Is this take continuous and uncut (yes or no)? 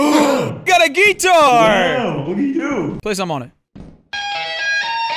no